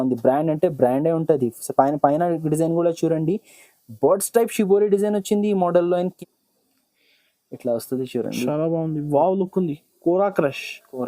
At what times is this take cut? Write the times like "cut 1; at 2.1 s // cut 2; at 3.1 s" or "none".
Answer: cut 1; at 6.1 s